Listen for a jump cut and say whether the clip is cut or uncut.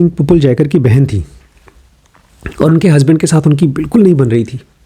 uncut